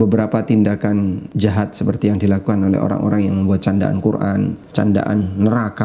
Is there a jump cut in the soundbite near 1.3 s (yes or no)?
yes